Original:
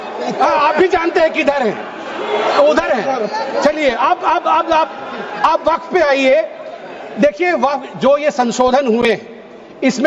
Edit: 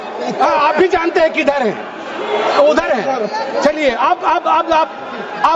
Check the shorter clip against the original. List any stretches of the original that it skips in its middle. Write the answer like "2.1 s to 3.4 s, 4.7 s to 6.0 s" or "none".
none